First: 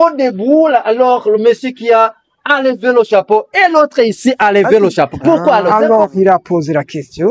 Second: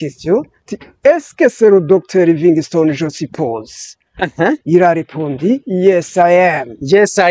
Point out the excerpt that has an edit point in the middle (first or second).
first